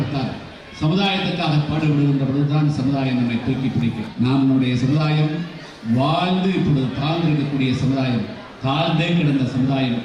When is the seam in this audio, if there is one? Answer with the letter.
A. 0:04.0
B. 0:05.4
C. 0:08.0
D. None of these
A